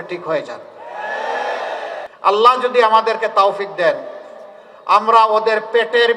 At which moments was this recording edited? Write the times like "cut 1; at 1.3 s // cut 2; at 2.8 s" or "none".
cut 1; at 2.1 s